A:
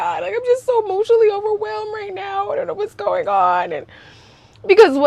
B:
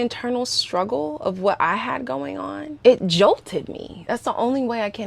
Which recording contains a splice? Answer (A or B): B